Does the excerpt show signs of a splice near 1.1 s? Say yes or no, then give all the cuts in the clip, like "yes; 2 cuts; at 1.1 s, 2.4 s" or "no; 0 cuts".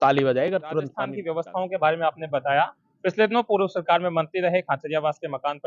yes; 1 cut; at 1.1 s